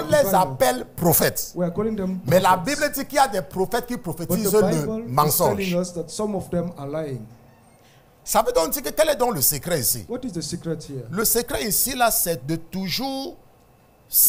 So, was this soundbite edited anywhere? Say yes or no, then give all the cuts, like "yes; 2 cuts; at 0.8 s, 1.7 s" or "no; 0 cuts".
no; 0 cuts